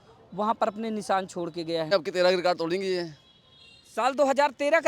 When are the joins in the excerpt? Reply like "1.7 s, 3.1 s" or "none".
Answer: 1.9 s